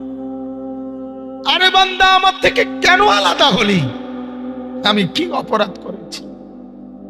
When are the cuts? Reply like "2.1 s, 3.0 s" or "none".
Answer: 1.1 s